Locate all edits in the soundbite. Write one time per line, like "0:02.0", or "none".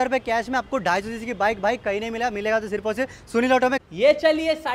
0:03.9